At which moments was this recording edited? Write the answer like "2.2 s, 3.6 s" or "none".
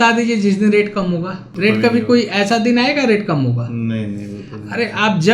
1.4 s